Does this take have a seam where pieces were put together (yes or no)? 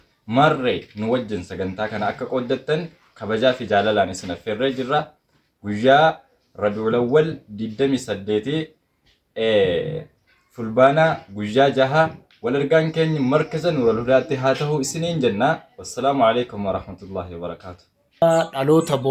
yes